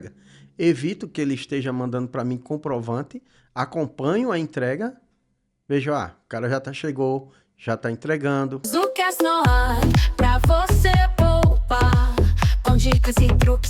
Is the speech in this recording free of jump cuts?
no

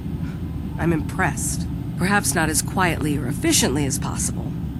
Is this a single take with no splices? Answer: yes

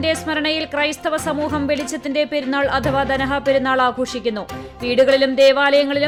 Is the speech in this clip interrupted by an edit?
no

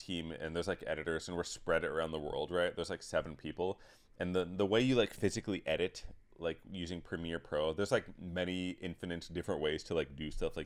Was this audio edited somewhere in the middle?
no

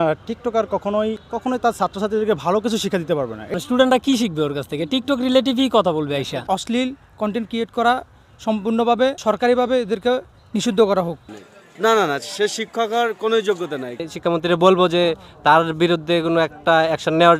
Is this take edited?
yes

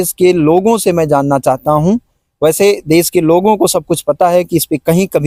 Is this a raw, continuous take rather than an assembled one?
yes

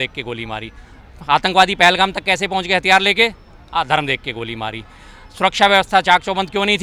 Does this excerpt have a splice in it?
no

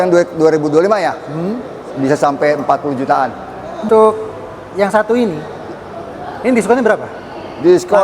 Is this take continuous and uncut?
no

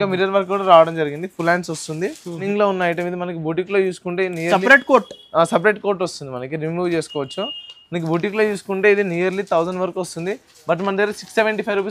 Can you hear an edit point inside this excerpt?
yes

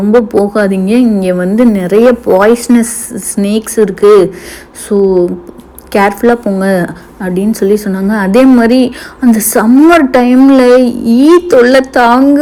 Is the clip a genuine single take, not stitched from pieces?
yes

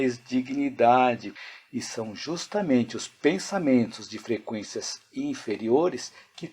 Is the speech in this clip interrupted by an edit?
yes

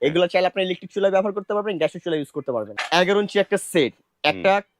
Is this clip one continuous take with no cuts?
no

